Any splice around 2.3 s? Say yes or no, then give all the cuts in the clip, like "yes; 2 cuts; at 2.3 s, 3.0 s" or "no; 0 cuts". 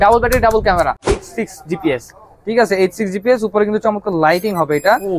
no; 1 cut; at 1.1 s